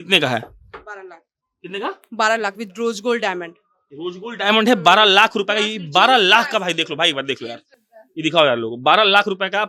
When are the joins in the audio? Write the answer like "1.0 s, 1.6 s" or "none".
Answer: none